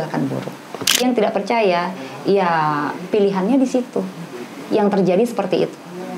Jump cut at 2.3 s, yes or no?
no